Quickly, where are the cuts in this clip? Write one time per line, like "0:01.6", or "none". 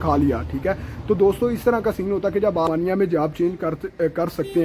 0:02.7